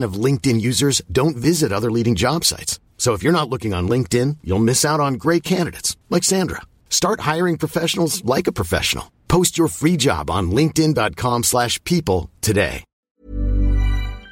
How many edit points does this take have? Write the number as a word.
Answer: one